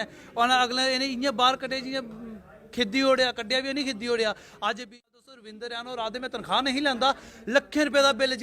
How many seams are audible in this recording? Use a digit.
1